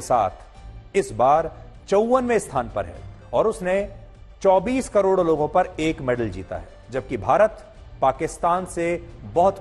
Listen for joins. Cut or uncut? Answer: uncut